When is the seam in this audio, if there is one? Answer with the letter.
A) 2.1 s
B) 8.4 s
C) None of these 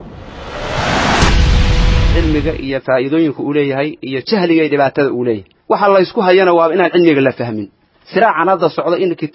A